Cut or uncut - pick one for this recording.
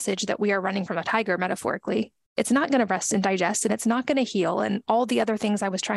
uncut